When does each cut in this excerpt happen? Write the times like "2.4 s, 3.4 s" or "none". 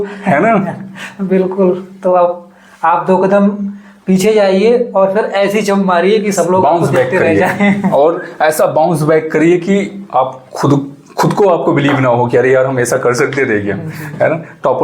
none

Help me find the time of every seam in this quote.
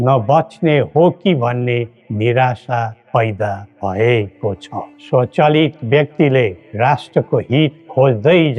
4.9 s

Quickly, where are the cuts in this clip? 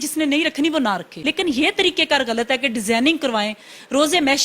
1.1 s

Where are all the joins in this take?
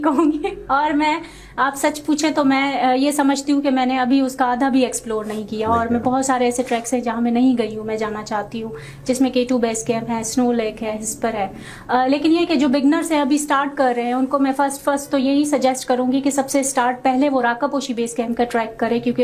none

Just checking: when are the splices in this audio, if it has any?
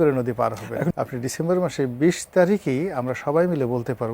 0.9 s

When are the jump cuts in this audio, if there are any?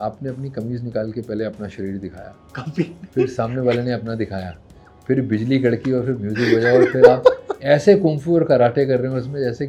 none

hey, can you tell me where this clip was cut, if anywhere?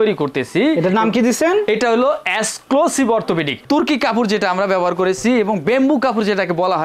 3.6 s

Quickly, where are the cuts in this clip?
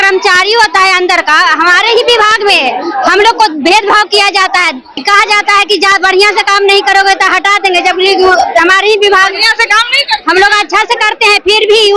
5.0 s

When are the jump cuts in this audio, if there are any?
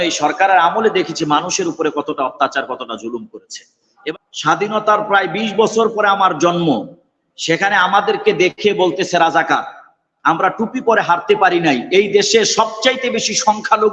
4.0 s

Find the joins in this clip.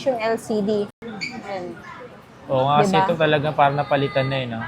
0.9 s

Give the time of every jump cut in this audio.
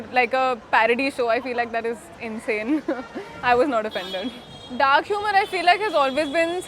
none

